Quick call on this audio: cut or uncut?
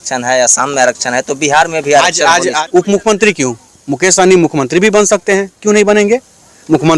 cut